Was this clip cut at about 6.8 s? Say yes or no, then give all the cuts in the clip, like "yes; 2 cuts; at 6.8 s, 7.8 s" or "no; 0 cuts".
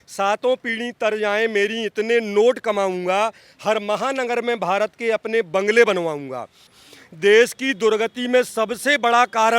yes; 1 cut; at 6.8 s